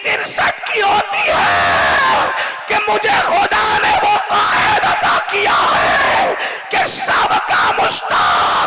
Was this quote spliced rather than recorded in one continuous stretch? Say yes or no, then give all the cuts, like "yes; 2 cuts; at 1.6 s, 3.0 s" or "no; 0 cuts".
no; 0 cuts